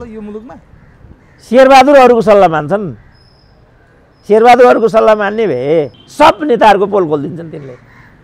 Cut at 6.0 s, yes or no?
yes